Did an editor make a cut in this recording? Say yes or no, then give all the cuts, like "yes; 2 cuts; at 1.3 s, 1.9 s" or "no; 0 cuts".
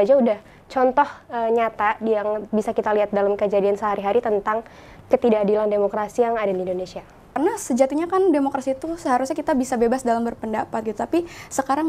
yes; 1 cut; at 7.3 s